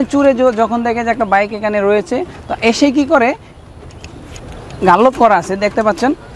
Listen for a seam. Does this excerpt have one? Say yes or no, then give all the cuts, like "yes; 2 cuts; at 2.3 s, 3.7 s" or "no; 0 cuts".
no; 0 cuts